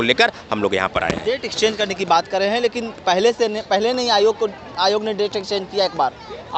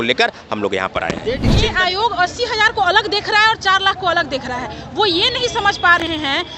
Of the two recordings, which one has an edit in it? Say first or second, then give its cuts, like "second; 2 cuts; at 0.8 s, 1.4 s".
second; 1 cut; at 1.7 s